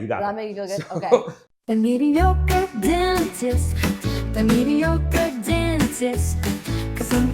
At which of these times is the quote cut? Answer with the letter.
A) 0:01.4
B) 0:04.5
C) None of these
A